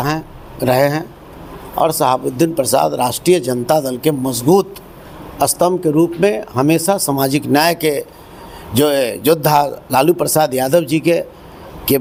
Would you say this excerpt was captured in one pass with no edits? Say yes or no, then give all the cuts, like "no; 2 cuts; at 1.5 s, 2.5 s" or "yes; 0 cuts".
yes; 0 cuts